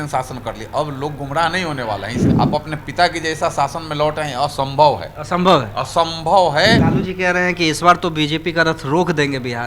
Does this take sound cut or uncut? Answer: cut